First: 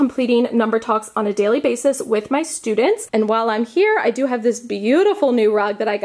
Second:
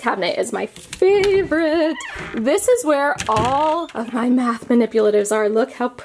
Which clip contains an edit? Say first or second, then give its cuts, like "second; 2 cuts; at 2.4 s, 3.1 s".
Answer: first; 1 cut; at 3.0 s